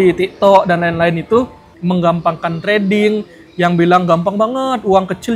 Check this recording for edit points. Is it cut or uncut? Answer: cut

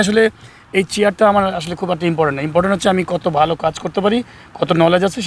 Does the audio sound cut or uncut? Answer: uncut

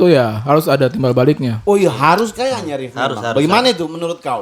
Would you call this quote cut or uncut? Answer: uncut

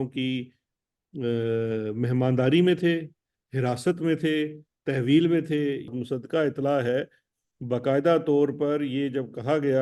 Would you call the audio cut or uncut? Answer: cut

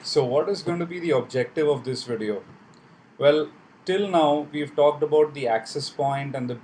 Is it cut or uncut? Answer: cut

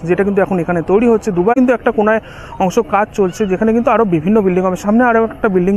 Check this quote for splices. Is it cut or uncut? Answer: cut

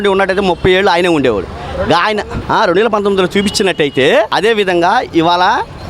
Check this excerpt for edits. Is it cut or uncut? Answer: cut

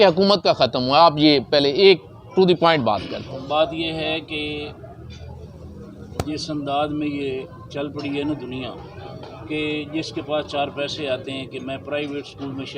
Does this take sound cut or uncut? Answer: uncut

